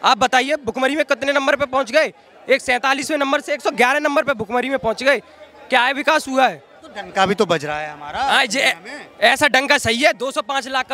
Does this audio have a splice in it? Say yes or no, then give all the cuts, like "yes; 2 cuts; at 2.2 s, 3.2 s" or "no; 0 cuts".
no; 0 cuts